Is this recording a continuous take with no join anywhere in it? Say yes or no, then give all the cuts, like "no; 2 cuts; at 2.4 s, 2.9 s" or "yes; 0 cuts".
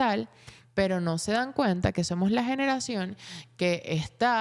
yes; 0 cuts